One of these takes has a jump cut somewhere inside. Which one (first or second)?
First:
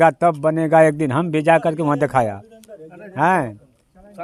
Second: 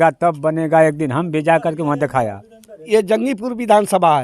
second